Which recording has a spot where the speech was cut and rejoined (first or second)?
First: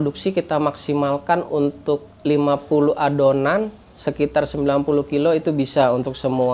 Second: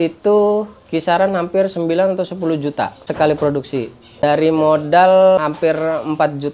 second